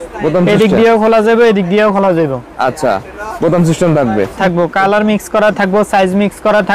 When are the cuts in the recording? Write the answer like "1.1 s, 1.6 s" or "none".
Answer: 4.4 s